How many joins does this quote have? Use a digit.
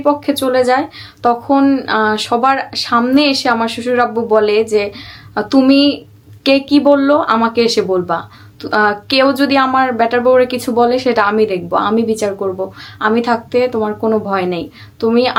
0